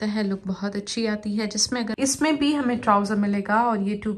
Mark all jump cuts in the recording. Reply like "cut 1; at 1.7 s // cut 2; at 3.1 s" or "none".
cut 1; at 1.9 s